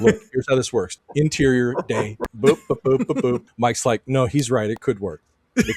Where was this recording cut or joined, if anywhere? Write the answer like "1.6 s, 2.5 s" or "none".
0.9 s, 2.2 s, 3.5 s